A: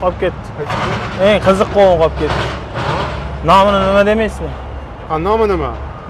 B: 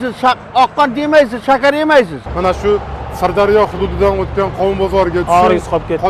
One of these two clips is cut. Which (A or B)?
B